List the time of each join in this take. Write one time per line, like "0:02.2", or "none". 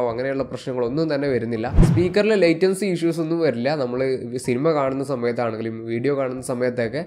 0:01.8